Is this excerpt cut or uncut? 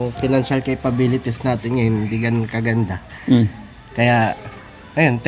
uncut